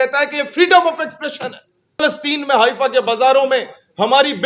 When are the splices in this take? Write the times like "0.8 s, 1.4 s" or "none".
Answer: 2.0 s